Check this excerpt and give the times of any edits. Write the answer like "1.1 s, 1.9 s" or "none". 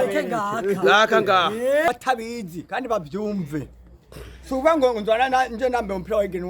1.9 s